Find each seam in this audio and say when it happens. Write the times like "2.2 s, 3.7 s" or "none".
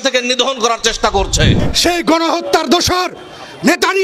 1.6 s

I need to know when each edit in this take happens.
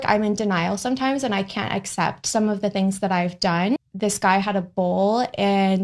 3.9 s

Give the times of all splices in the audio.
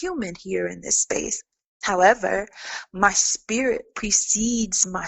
1.8 s

